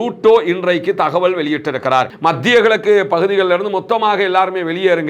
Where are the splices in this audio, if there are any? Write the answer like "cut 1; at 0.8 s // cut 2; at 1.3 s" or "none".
cut 1; at 2.1 s